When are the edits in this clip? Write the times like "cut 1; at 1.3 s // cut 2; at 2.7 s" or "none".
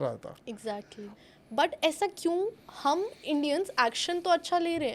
cut 1; at 1.1 s

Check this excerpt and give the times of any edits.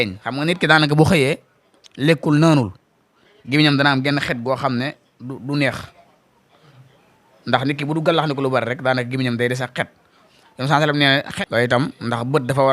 cut 1; at 11.3 s

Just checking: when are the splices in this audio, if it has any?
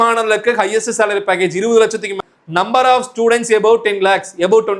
cut 1; at 2.1 s

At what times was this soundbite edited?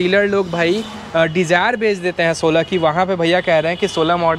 none

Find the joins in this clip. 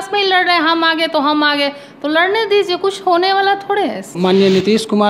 cut 1; at 4.1 s

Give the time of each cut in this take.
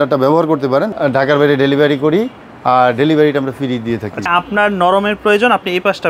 cut 1; at 0.9 s // cut 2; at 4.3 s

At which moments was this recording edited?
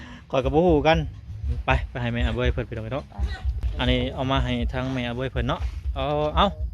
cut 1; at 1.4 s

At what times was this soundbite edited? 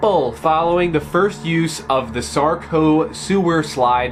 none

